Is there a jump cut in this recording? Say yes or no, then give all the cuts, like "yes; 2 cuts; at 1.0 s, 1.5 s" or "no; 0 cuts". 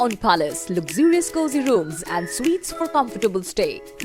no; 0 cuts